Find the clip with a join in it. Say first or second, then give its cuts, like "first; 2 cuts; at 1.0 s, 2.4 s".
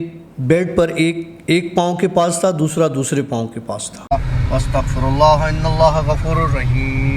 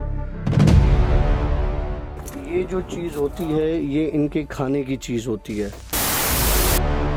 first; 1 cut; at 3.9 s